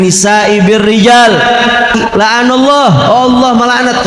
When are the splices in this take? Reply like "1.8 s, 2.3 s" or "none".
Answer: 1.9 s